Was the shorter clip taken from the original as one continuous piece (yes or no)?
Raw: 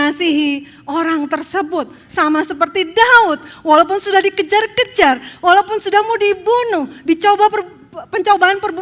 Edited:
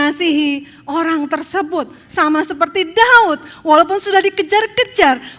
yes